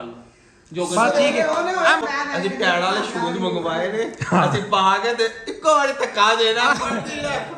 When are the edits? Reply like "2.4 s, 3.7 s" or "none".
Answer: 2.0 s